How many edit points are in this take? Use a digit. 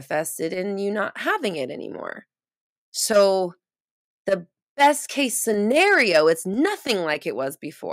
0